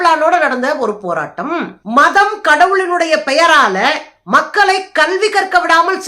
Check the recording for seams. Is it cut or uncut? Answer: cut